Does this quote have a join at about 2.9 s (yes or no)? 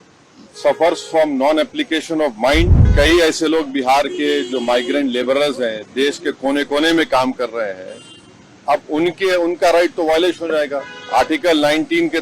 yes